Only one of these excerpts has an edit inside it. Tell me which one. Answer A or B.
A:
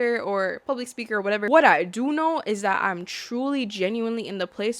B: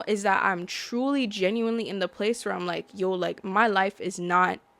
A